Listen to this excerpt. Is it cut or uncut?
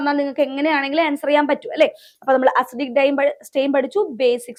uncut